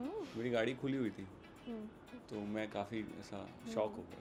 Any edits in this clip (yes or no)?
no